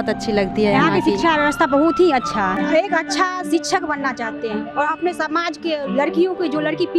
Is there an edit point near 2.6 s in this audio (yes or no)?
yes